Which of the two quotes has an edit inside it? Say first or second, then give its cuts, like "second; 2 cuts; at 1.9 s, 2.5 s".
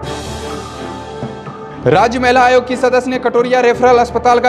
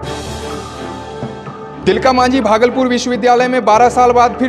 second; 1 cut; at 1.7 s